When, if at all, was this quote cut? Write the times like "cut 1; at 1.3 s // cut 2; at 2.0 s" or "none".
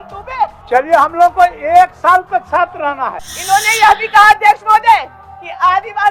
cut 1; at 3.3 s

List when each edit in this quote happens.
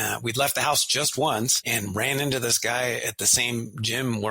cut 1; at 1.6 s

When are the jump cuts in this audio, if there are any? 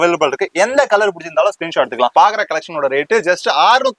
cut 1; at 2.1 s

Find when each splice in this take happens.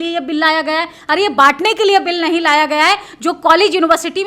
none

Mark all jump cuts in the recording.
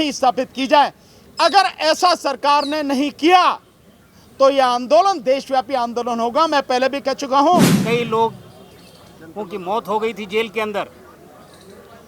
cut 1; at 7.8 s

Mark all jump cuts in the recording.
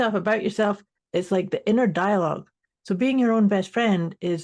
cut 1; at 0.9 s

